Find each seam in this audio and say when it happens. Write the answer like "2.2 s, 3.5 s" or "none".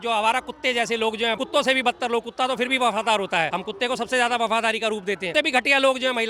1.4 s, 3.5 s, 5.3 s